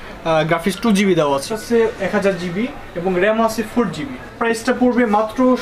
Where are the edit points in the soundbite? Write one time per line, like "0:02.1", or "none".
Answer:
0:01.5
0:04.3